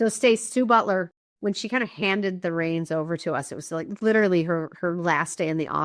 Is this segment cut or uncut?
cut